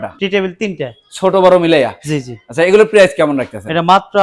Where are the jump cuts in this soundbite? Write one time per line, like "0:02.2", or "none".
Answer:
none